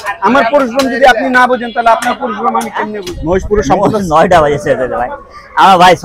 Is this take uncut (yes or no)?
no